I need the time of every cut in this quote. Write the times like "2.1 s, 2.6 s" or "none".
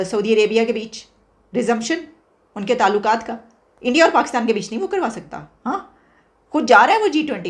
none